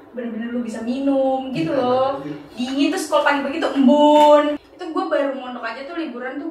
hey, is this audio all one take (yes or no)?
no